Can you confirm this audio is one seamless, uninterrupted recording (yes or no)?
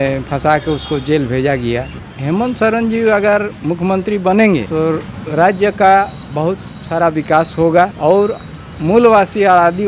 no